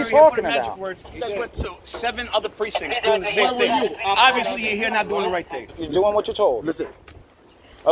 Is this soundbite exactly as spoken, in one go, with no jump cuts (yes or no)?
no